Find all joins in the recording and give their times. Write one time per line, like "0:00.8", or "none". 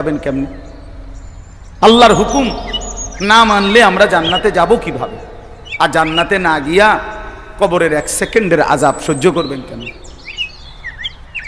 0:10.2